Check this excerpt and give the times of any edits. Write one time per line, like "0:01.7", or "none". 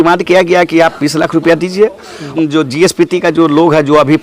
0:02.3